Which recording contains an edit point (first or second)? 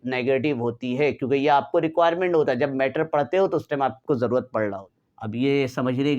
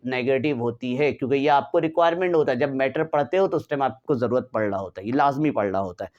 first